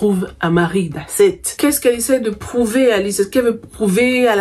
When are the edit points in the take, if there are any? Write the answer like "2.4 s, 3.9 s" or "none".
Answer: 1.5 s